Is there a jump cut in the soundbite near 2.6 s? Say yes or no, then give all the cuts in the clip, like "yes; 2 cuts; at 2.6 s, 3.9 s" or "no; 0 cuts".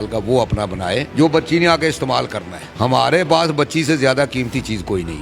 no; 1 cut; at 1.1 s